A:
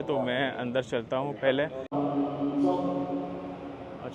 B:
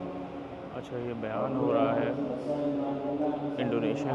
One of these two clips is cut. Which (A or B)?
A